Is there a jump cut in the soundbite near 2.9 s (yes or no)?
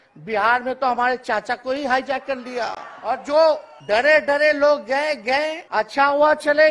yes